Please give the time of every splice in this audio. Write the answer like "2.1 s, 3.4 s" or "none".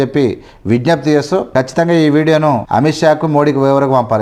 none